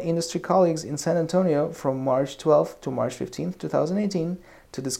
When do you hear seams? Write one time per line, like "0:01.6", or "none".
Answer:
none